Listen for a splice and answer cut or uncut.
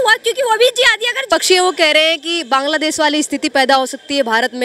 cut